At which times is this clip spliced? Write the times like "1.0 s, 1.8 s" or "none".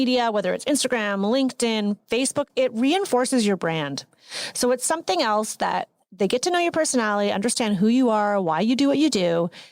2.5 s